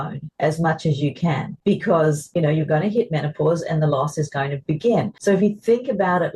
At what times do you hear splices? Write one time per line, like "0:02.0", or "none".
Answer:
0:01.5
0:02.2
0:05.1